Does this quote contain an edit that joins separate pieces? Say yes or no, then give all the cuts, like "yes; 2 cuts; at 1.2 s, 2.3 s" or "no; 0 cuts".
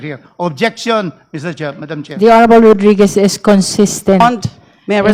no; 0 cuts